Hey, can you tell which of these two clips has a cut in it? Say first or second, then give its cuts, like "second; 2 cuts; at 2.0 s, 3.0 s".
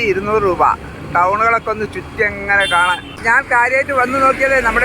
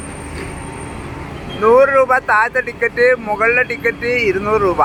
first; 1 cut; at 3.1 s